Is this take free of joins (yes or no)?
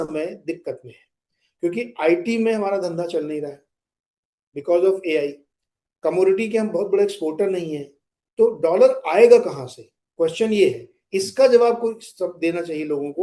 yes